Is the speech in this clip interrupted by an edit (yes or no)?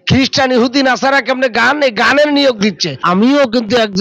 yes